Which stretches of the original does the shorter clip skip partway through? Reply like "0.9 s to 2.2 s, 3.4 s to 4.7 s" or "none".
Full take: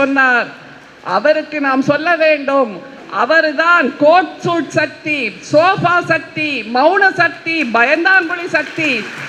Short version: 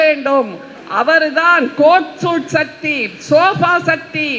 none